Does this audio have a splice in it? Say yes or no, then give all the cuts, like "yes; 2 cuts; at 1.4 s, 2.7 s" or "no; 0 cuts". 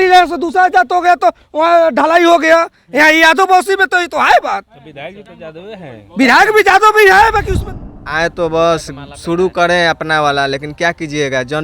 yes; 1 cut; at 7.7 s